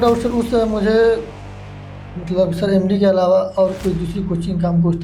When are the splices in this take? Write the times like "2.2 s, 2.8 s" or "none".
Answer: none